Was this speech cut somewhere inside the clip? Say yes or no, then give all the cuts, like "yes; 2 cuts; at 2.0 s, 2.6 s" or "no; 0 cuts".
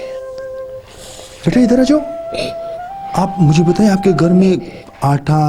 yes; 1 cut; at 0.9 s